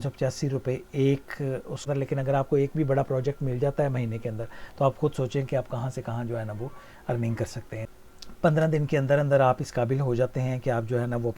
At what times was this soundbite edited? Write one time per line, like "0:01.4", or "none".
0:01.9
0:07.8